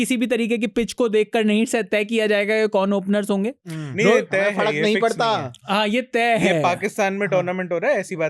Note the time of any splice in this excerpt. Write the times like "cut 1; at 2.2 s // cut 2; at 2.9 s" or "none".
none